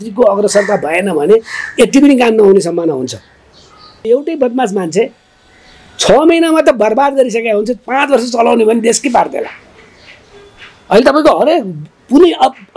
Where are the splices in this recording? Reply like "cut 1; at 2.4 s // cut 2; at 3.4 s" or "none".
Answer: cut 1; at 4.1 s